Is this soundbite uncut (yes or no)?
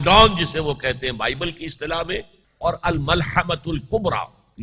no